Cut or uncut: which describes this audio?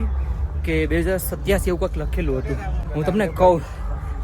cut